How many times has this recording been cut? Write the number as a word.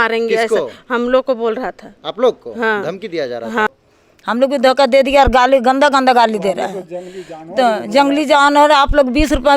one